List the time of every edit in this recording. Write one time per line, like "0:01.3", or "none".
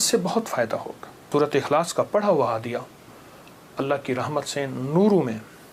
0:01.3